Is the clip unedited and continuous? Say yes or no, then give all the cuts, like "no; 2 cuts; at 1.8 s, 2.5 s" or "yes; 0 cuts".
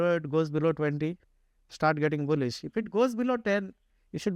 yes; 0 cuts